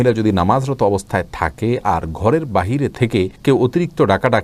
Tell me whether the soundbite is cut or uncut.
uncut